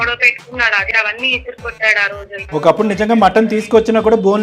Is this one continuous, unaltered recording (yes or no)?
no